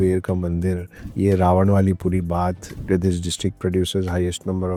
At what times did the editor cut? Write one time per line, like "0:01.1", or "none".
none